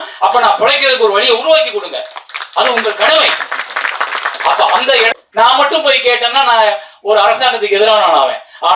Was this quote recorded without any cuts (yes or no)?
no